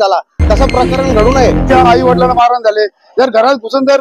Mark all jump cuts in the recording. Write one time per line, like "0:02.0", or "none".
0:01.6